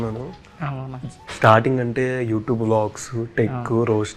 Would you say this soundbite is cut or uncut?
uncut